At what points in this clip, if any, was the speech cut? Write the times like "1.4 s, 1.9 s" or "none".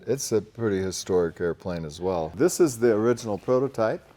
2.3 s